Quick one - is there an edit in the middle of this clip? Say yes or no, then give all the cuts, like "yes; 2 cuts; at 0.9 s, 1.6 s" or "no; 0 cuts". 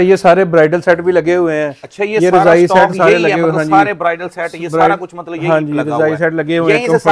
no; 0 cuts